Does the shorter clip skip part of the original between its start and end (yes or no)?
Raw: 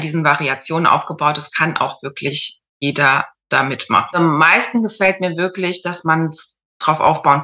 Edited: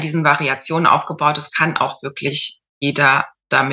no